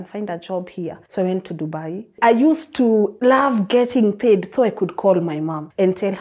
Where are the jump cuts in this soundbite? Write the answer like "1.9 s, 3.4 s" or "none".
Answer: 1.0 s, 2.1 s, 3.1 s